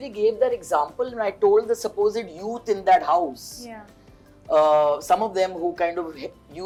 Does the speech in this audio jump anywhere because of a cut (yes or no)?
no